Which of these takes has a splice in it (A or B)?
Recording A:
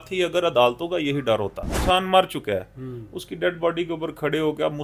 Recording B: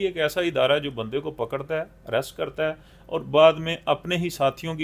A